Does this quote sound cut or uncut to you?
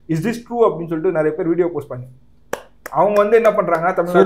uncut